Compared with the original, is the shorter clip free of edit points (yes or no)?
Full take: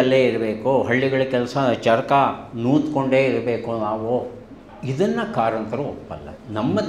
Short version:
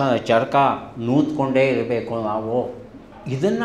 yes